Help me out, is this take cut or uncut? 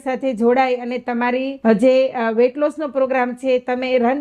cut